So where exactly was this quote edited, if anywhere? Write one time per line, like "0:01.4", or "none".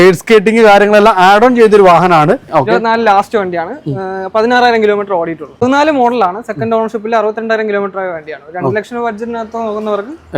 0:02.7
0:05.5